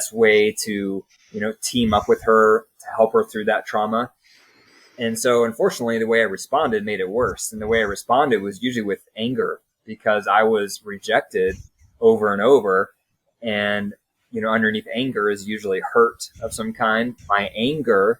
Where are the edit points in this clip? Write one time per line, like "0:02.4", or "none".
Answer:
0:17.2